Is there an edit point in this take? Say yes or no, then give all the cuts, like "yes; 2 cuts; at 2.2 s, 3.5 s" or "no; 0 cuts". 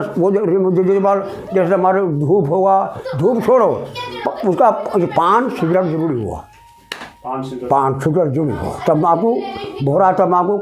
no; 0 cuts